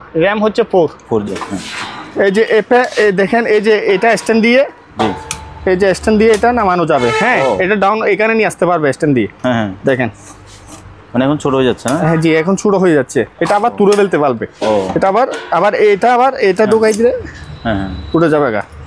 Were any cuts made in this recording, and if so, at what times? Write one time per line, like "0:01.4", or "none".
0:01.3